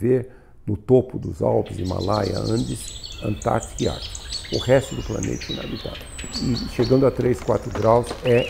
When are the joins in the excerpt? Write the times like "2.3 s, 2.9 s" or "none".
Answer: 6.3 s